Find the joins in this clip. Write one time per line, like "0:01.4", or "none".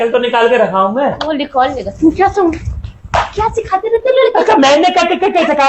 0:01.2